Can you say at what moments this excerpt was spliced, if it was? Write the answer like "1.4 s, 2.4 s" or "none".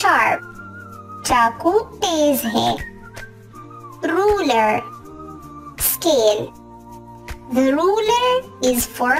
none